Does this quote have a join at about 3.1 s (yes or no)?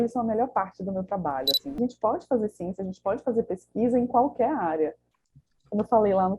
no